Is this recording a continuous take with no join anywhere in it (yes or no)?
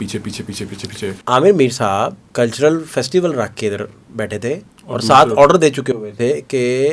no